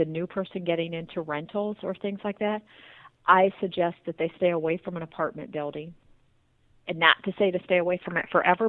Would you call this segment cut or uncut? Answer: uncut